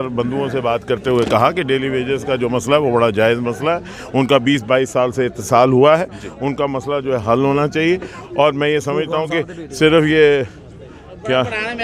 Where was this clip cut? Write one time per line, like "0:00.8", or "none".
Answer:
none